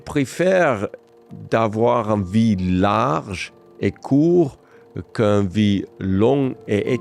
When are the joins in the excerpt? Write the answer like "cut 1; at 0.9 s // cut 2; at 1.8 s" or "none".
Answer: none